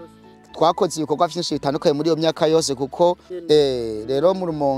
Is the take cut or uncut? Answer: cut